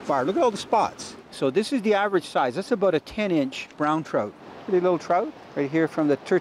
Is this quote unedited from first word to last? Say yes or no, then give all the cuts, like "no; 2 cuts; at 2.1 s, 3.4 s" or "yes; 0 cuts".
no; 3 cuts; at 1.0 s, 4.1 s, 5.4 s